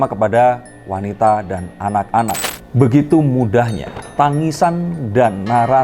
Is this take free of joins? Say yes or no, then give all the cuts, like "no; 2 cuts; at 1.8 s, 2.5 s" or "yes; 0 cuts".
no; 1 cut; at 2.4 s